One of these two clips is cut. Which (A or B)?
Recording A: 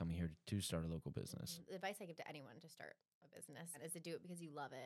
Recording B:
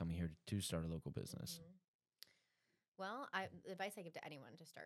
A